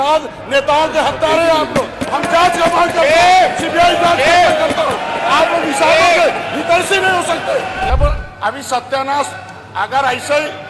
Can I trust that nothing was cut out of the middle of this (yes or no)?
no